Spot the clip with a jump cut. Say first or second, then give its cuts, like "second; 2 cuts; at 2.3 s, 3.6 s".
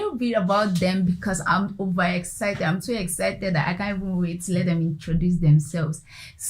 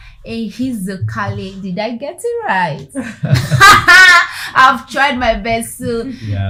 first; 1 cut; at 1.2 s